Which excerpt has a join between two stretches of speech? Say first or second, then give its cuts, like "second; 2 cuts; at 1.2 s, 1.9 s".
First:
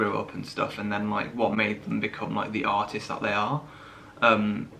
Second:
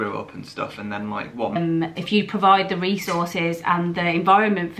second; 1 cut; at 1.6 s